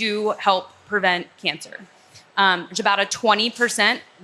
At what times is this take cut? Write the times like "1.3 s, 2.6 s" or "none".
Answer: none